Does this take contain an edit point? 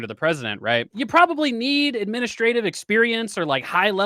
yes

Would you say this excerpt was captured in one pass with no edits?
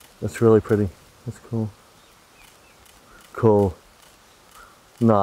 no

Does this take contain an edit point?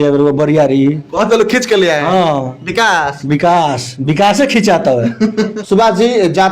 no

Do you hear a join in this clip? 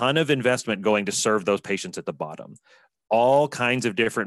no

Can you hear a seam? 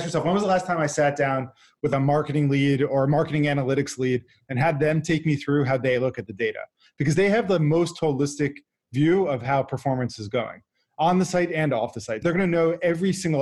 yes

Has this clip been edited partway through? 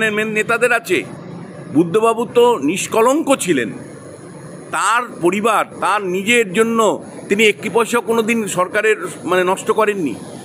no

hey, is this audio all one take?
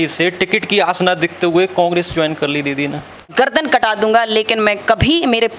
no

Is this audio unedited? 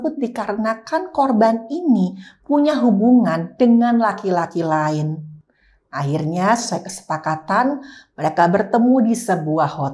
yes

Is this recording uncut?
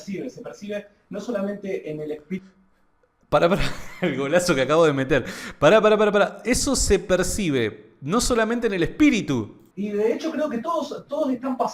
no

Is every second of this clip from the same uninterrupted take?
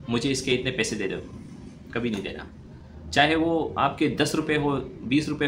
yes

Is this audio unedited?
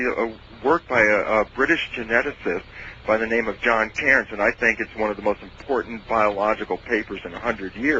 yes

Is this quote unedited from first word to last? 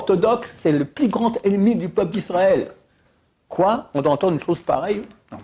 yes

